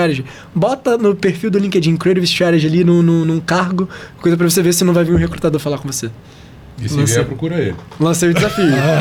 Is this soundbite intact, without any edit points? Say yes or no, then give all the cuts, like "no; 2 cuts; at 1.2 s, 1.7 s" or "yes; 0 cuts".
yes; 0 cuts